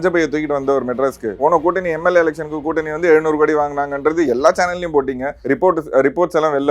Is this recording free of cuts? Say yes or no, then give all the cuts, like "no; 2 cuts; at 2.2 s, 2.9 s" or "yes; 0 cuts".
no; 2 cuts; at 1.4 s, 5.3 s